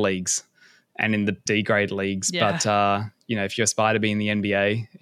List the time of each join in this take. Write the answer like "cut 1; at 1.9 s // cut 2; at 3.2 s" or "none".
cut 1; at 1.5 s